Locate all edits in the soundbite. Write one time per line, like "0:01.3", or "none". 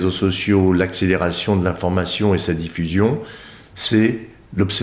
none